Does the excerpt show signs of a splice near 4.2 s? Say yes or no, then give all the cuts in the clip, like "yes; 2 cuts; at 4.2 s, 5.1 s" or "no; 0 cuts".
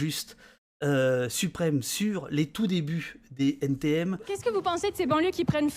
yes; 1 cut; at 4.2 s